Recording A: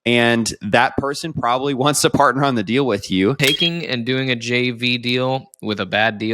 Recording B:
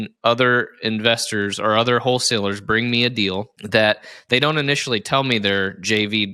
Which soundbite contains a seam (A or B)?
A